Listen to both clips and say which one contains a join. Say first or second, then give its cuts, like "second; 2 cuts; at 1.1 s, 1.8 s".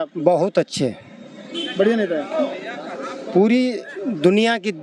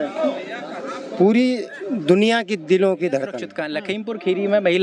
second; 1 cut; at 3.7 s